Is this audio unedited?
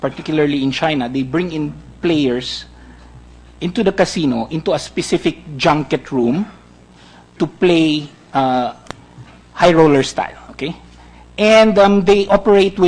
no; 1 cut; at 5.0 s

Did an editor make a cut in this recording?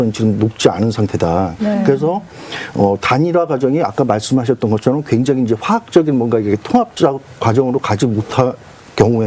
no; 0 cuts

